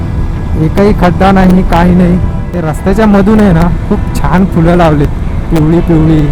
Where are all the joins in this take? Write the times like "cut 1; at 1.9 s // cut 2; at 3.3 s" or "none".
cut 1; at 2.5 s